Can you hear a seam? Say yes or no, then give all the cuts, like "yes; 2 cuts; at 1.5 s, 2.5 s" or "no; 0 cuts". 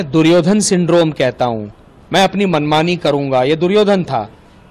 no; 0 cuts